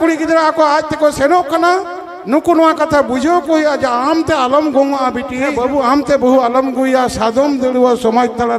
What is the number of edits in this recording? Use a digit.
1